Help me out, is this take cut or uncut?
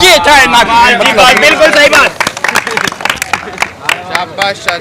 uncut